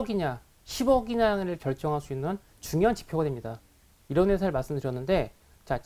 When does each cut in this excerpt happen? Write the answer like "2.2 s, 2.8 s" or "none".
3.9 s